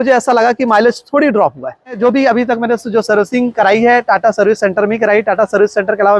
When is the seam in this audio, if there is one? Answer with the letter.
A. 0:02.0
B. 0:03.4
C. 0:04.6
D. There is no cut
A